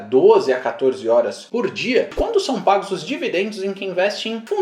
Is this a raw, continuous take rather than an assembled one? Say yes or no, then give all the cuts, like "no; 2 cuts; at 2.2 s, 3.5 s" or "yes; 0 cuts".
no; 1 cut; at 2.1 s